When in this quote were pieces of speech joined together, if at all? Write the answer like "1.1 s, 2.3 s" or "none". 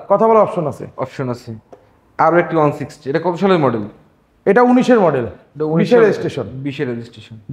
none